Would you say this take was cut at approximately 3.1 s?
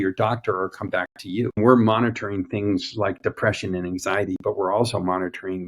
no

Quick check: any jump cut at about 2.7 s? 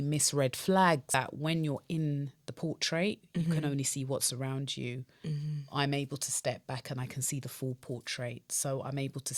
no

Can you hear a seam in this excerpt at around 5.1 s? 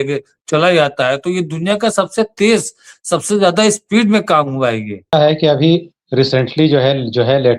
yes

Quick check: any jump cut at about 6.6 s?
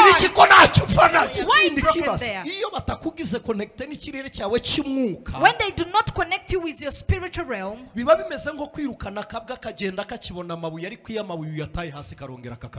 no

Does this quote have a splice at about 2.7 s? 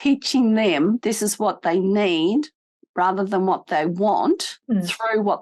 no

